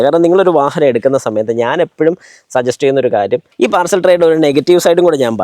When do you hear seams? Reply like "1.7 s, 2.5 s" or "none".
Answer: 3.5 s